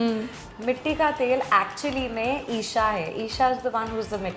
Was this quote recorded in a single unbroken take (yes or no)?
yes